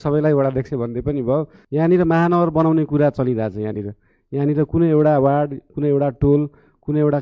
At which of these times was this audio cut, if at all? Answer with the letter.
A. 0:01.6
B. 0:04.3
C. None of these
A